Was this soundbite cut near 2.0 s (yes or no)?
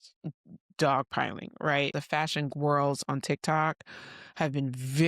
yes